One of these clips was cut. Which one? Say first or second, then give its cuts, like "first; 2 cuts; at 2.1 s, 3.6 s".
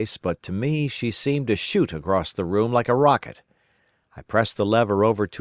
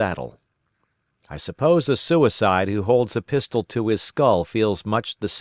second; 1 cut; at 2.2 s